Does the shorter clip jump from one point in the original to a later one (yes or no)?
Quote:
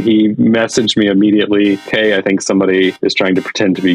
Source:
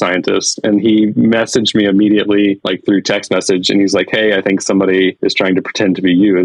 yes